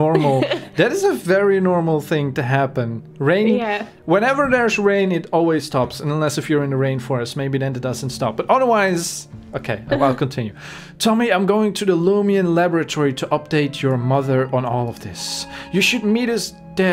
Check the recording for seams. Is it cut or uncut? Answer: uncut